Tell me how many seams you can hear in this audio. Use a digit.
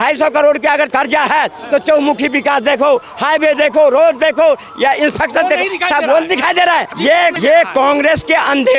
2